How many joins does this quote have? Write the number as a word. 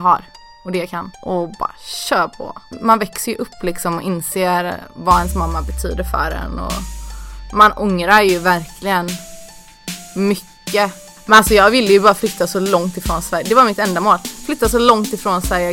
three